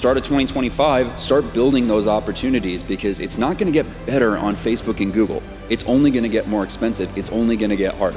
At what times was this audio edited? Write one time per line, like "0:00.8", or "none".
none